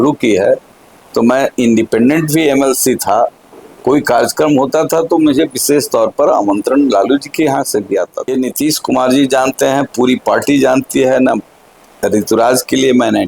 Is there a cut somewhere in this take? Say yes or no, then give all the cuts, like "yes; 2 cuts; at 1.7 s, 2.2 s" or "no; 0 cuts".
yes; 1 cut; at 8.3 s